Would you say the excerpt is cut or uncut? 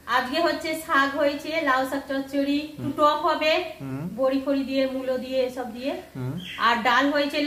uncut